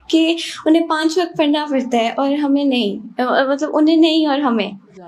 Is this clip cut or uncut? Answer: uncut